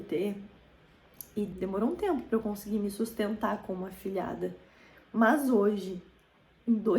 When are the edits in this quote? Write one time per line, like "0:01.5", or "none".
0:01.5